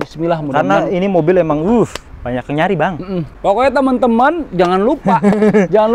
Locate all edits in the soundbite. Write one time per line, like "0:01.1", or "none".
0:03.3